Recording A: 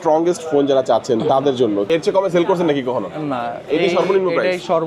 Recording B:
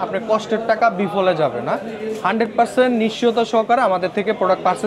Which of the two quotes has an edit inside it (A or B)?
A